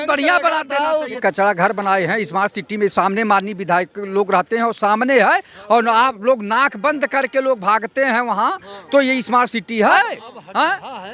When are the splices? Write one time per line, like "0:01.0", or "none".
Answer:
0:01.2
0:10.0

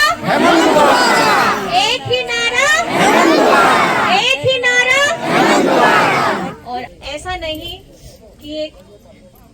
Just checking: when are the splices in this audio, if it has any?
0:06.9

